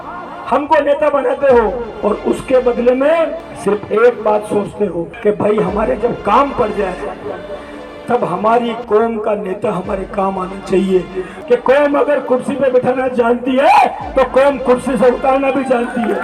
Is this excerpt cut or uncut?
cut